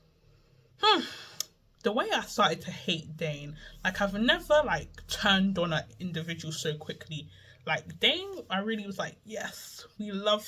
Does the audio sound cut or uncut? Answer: uncut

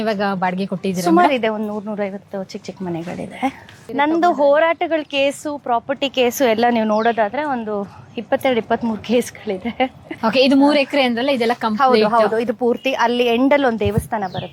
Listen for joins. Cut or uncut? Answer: cut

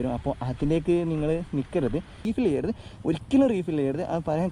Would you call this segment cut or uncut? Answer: cut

